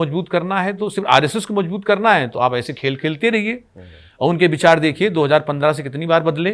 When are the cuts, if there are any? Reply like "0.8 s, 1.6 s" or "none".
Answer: none